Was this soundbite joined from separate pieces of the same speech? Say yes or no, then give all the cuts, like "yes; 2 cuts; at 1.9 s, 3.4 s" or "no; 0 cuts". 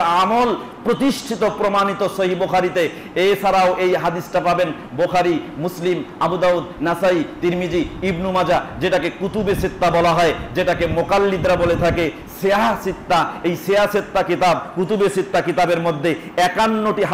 no; 0 cuts